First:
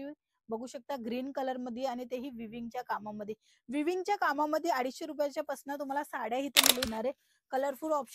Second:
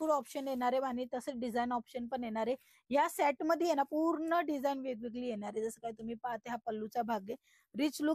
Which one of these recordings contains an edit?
first; 1 cut; at 6.9 s

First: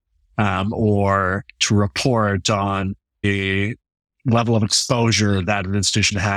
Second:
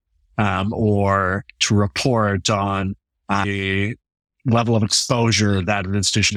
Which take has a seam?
first; 1 cut; at 3.2 s

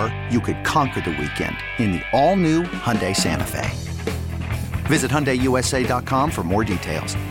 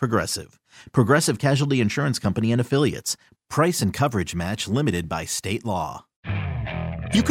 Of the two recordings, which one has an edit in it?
second; 1 cut; at 6.1 s

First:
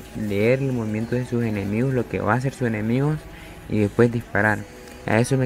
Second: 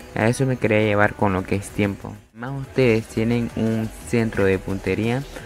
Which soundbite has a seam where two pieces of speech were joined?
second; 1 cut; at 2.6 s

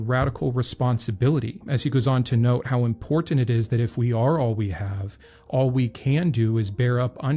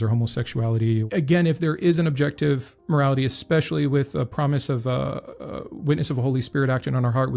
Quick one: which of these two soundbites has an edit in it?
second; 1 cut; at 1.1 s

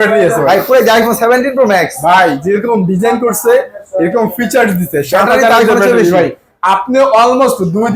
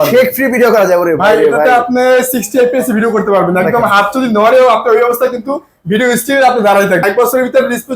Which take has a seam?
second; 1 cut; at 7.0 s

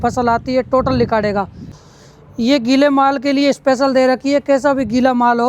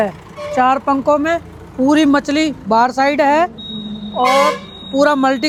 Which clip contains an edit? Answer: first; 1 cut; at 1.7 s

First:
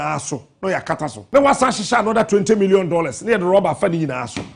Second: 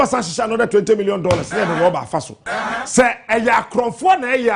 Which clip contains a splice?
first; 1 cut; at 1.2 s

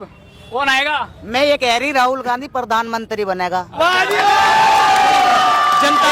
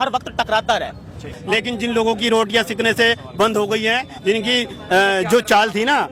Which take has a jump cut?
second; 1 cut; at 1.4 s

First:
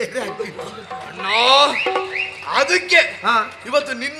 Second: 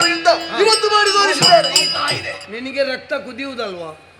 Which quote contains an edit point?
second; 1 cut; at 1.9 s

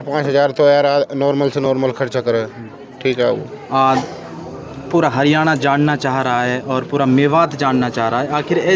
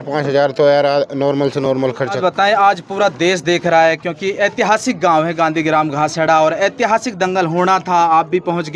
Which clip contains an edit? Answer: second; 1 cut; at 2.2 s

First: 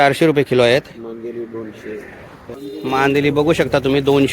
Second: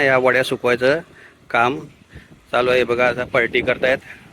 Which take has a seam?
first; 1 cut; at 2.5 s

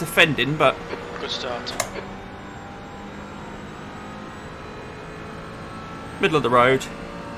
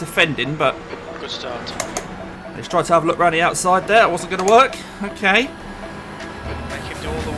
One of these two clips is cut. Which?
second; 2 cuts; at 1.9 s, 6.2 s

